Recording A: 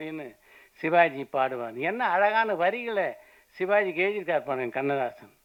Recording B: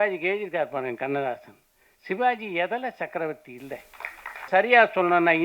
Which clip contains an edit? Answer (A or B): B